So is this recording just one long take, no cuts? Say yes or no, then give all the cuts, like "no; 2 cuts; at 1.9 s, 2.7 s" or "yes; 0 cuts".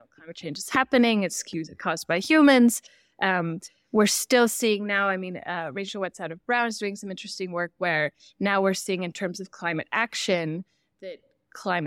yes; 0 cuts